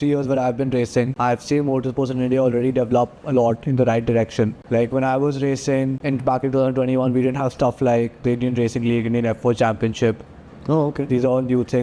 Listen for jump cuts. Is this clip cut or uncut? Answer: cut